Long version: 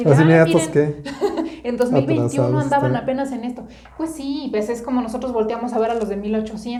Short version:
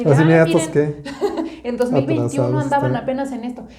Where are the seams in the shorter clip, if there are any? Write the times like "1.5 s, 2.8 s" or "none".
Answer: none